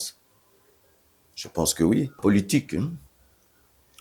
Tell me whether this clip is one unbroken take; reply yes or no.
no